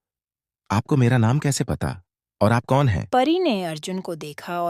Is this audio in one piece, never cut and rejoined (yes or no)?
no